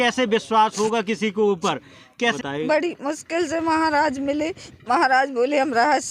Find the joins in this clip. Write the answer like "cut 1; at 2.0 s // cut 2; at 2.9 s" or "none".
cut 1; at 2.4 s